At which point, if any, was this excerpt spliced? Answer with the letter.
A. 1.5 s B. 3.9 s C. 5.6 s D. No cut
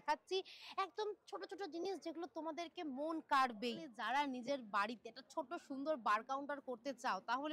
B